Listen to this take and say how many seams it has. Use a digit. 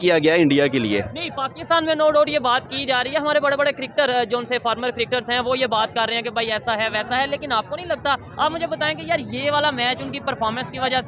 0